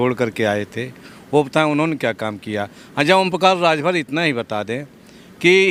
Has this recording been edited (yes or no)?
no